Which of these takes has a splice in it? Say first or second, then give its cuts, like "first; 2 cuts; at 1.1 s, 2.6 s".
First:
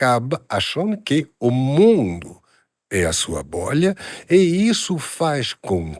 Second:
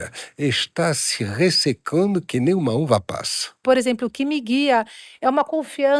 second; 1 cut; at 3.6 s